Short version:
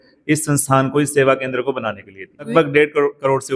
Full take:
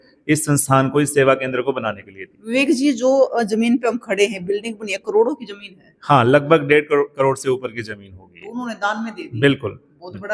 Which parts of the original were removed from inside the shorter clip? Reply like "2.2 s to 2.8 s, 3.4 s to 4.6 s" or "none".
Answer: 2.5 s to 6.4 s